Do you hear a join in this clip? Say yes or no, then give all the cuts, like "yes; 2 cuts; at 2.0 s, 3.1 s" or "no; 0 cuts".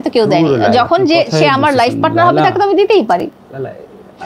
no; 0 cuts